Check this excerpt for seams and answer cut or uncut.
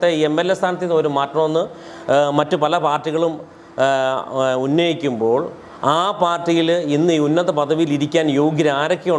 uncut